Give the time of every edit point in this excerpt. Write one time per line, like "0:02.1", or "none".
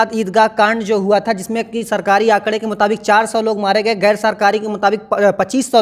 none